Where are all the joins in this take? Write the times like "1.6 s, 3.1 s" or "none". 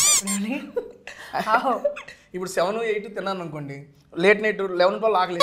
none

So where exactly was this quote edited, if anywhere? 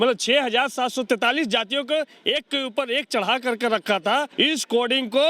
4.3 s

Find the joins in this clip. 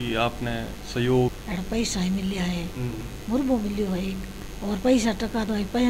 none

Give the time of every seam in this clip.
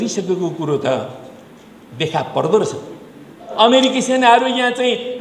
3.4 s

